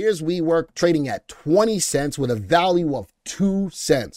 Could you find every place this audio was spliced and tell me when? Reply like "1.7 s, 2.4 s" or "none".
none